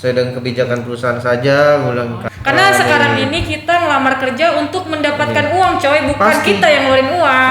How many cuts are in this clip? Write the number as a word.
one